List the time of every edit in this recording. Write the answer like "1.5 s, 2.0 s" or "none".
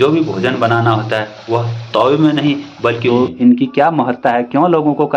3.0 s